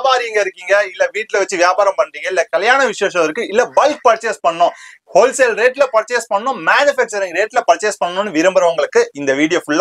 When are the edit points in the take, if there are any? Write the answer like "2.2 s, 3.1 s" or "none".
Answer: none